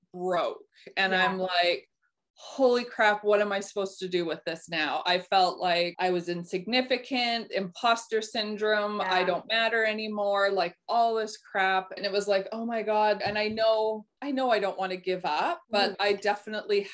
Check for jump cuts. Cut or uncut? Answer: cut